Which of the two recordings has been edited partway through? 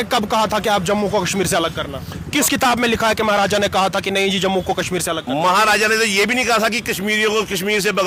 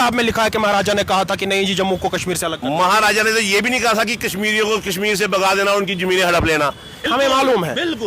second; 1 cut; at 7.1 s

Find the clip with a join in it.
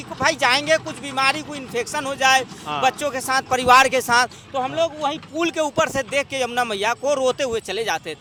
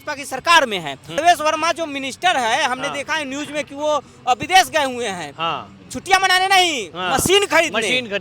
second; 1 cut; at 1.2 s

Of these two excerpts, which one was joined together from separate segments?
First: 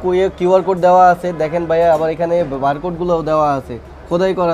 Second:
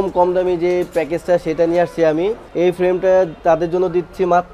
second; 1 cut; at 2.4 s

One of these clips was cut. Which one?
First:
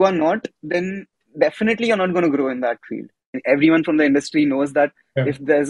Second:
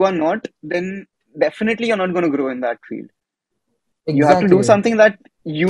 first; 1 cut; at 3.3 s

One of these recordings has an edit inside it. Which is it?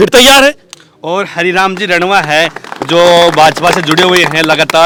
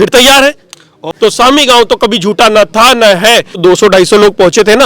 second; 2 cuts; at 1.1 s, 3.6 s

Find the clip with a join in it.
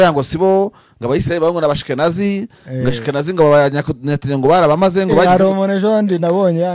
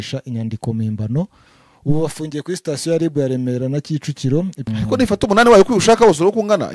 second; 1 cut; at 4.6 s

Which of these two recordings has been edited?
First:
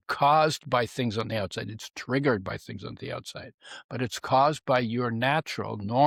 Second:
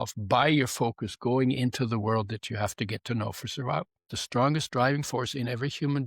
second; 1 cut; at 4.1 s

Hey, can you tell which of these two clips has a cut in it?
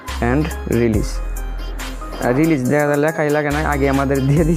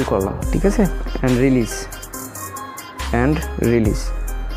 second; 1 cut; at 1.0 s

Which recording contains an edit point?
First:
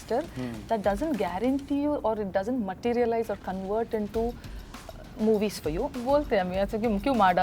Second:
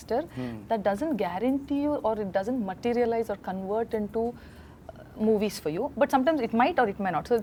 first; 1 cut; at 5.9 s

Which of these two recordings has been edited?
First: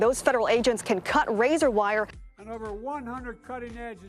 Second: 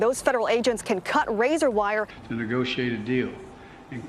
second; 1 cut; at 2.2 s

